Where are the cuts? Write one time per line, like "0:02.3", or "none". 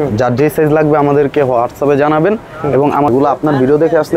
0:03.1